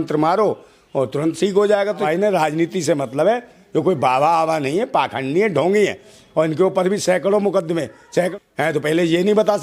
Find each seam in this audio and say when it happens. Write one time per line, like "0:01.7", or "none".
0:02.1
0:08.3